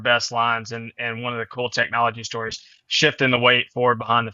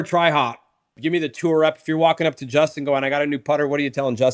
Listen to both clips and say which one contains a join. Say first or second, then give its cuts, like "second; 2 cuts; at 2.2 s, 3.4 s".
second; 1 cut; at 1.0 s